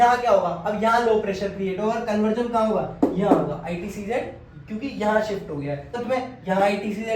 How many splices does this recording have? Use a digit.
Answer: 1